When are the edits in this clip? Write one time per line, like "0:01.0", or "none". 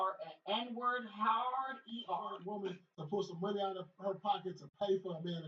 0:02.4

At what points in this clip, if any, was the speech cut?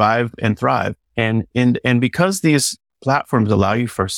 none

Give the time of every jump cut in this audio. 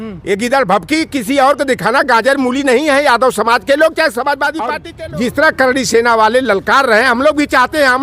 0:04.8

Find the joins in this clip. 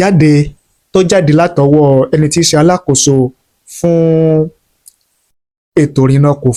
none

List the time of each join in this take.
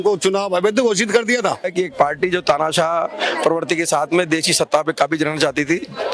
0:01.7

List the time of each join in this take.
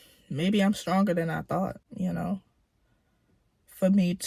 none

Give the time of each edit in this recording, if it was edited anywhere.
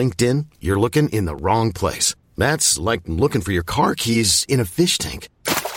none

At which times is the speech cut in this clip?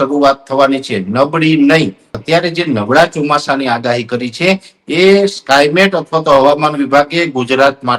0:02.2

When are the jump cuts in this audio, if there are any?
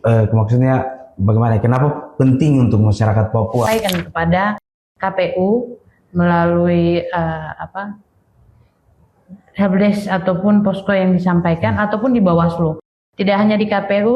0:03.7

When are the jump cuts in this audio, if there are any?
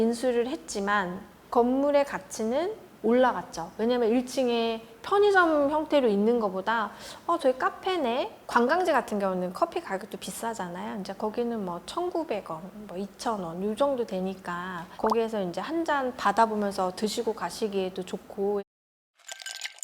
0:08.4
0:18.7

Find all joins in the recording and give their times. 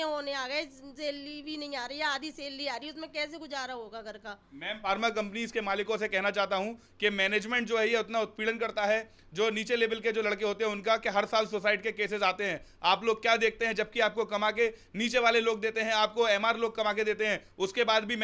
0:04.9

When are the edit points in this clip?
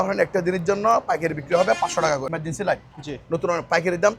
0:02.4

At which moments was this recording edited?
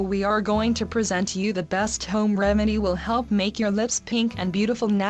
0:01.2

